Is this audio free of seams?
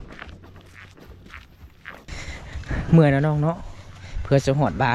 no; 1 cut; at 2.1 s

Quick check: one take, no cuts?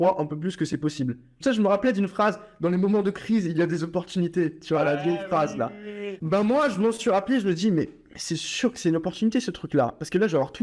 no; 2 cuts; at 1.3 s, 6.1 s

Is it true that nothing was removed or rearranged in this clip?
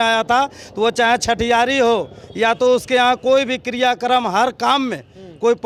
yes; 0 cuts

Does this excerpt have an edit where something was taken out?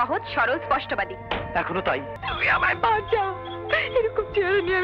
yes; 1 cut; at 2.1 s

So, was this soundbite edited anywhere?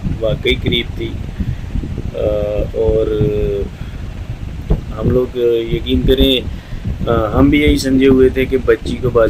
no; 0 cuts

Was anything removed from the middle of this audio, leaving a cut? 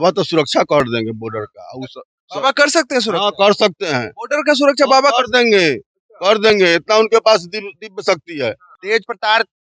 yes; 1 cut; at 8.7 s

